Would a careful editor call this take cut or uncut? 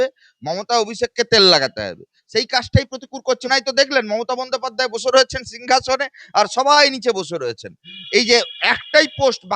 cut